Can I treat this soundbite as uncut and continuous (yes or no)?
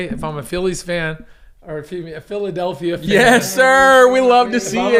yes